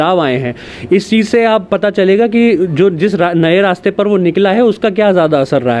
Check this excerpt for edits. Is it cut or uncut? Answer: uncut